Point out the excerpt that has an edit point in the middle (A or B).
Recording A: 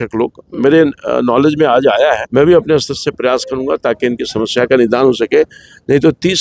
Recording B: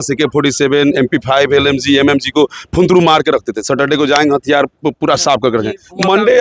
A